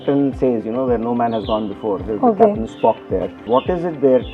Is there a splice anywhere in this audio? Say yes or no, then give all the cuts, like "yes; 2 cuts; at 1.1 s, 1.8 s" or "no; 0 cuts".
yes; 1 cut; at 3.4 s